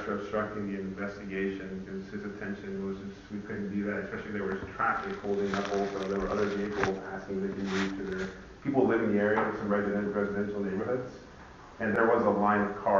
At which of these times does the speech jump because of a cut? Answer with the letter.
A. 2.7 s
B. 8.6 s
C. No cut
C